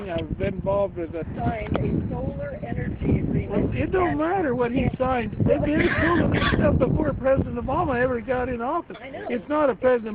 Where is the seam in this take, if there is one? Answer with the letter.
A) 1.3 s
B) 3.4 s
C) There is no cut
C